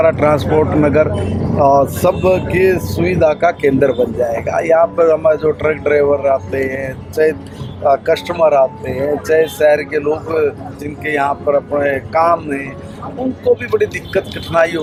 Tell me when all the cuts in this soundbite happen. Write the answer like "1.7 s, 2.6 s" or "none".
none